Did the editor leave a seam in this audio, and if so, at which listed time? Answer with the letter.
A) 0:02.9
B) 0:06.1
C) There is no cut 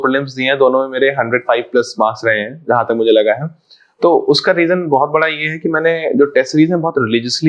C